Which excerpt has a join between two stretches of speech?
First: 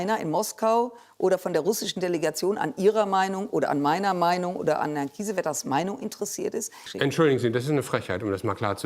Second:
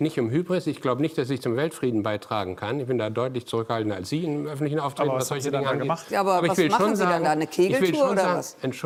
first; 1 cut; at 6.9 s

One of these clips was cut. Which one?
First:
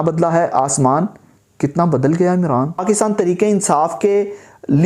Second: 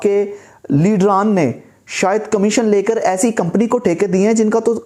first; 1 cut; at 2.8 s

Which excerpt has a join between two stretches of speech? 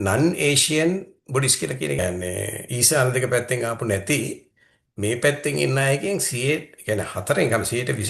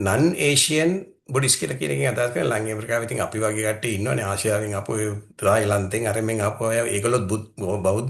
first; 1 cut; at 2.0 s

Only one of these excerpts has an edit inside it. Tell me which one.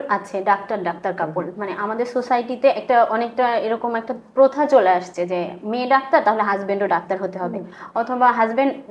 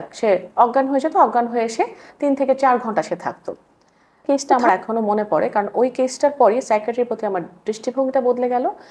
second; 1 cut; at 4.2 s

